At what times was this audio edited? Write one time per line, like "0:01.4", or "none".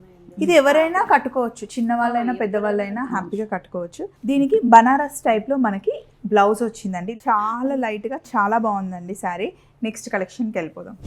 none